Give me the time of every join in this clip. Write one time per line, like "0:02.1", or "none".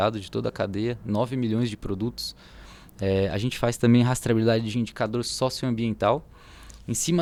none